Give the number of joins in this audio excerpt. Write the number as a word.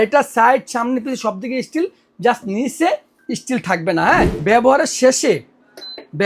one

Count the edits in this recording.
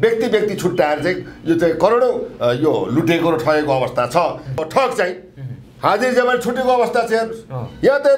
one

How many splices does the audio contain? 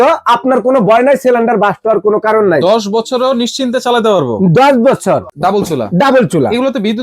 one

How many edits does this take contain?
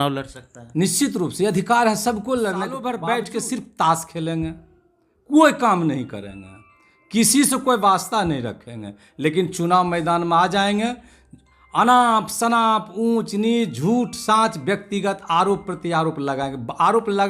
one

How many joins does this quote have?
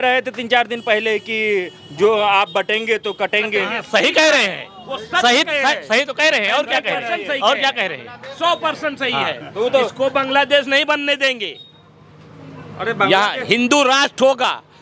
zero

